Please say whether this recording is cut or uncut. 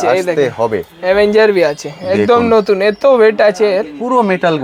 uncut